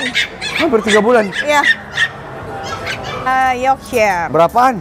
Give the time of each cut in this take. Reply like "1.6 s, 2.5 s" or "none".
3.3 s